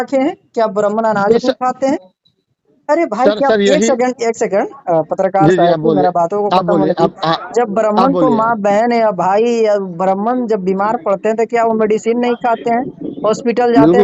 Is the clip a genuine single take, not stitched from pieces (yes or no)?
yes